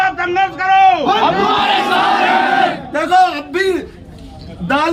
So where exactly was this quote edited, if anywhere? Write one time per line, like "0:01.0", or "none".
none